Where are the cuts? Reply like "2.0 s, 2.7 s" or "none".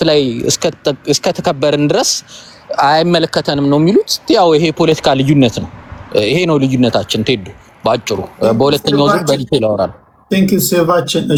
none

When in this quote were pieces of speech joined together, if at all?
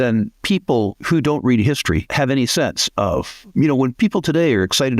1.0 s, 2.1 s, 3.7 s

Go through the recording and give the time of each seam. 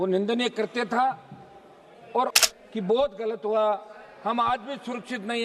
2.4 s

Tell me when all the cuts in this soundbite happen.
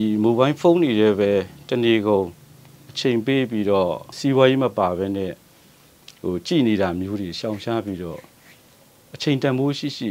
4.1 s

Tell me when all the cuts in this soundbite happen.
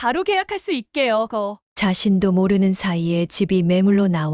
1.6 s

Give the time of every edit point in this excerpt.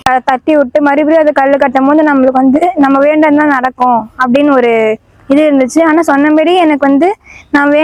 none

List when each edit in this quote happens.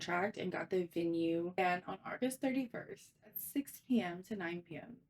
1.6 s

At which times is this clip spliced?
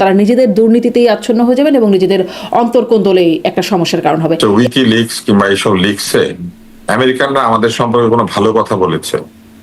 4.4 s

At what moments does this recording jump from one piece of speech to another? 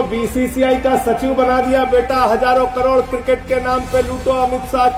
none

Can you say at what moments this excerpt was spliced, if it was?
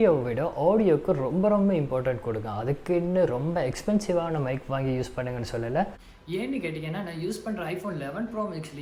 none

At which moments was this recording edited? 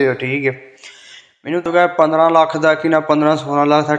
1.6 s

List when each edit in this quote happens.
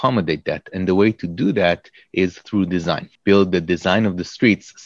3.1 s

